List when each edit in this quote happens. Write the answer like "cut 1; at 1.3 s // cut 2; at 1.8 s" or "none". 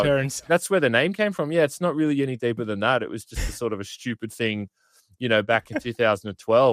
none